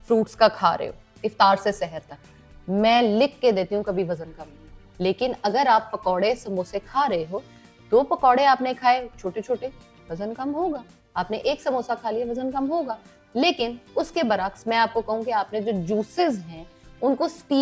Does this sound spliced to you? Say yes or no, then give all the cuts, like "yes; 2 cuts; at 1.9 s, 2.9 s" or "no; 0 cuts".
no; 0 cuts